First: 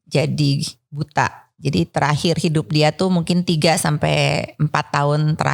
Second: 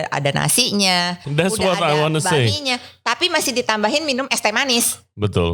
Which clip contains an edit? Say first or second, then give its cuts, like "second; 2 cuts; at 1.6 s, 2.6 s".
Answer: second; 1 cut; at 1.3 s